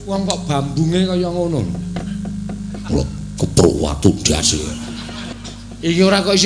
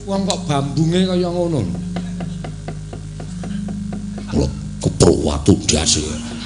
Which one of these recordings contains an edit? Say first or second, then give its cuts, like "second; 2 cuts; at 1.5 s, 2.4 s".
first; 2 cuts; at 2.0 s, 5.3 s